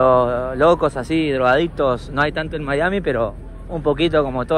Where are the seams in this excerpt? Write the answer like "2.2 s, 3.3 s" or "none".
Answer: none

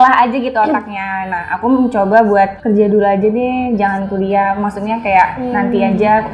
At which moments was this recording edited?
none

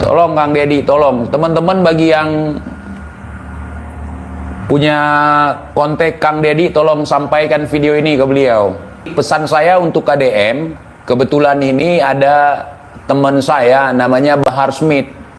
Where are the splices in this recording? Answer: 9.1 s

